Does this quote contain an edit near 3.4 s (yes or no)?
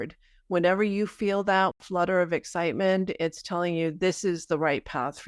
no